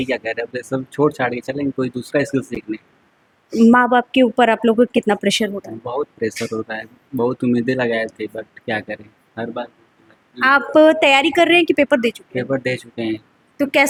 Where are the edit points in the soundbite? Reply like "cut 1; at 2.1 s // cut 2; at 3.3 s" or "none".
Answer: none